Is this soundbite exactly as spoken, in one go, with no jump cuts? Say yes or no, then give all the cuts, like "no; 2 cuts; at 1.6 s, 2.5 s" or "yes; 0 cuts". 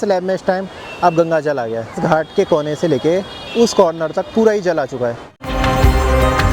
yes; 0 cuts